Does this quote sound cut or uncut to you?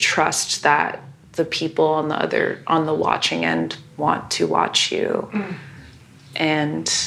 uncut